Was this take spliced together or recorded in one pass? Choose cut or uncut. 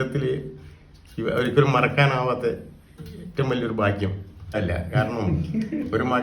cut